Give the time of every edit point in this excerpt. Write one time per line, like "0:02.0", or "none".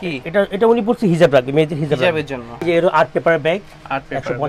0:02.6